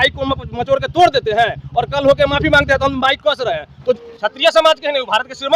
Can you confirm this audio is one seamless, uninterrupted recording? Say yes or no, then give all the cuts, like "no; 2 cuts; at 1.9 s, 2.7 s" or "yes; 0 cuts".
no; 1 cut; at 4.0 s